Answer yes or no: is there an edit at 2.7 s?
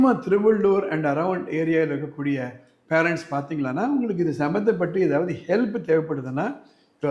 no